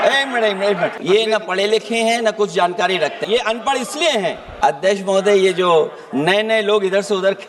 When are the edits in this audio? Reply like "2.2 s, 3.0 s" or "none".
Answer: 1.0 s, 3.2 s, 4.5 s